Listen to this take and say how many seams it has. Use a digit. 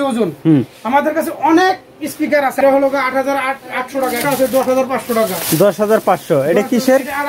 2